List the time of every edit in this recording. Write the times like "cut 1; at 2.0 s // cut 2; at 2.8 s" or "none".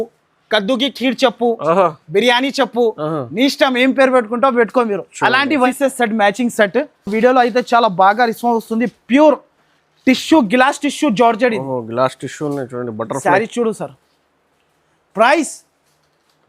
cut 1; at 5.7 s